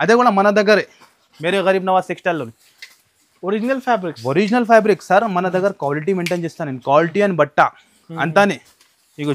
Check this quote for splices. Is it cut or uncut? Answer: uncut